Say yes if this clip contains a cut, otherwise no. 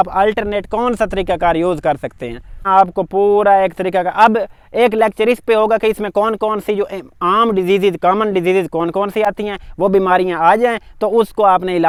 no